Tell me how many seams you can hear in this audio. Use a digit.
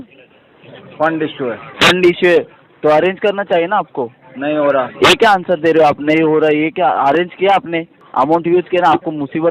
1